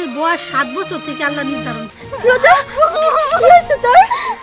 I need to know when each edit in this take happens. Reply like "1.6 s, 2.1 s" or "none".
1.9 s